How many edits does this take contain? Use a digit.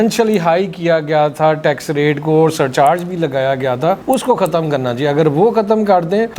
0